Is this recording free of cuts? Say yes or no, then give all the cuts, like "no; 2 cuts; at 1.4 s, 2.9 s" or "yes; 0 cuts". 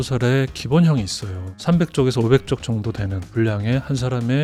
yes; 0 cuts